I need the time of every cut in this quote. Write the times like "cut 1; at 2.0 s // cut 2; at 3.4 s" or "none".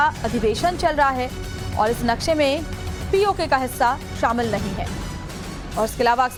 none